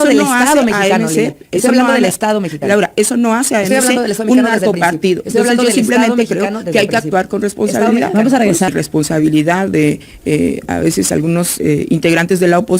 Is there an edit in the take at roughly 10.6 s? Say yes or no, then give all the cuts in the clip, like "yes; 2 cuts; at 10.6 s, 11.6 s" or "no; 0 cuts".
no; 1 cut; at 8.7 s